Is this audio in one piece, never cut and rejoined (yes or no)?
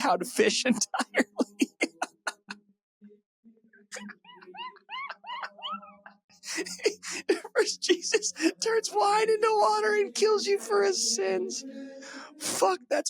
yes